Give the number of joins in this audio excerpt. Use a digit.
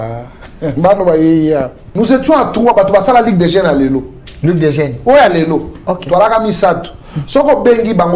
1